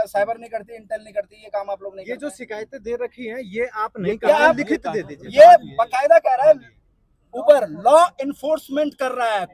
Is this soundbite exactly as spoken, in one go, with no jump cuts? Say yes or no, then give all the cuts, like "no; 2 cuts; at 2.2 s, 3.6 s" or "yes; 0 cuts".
yes; 0 cuts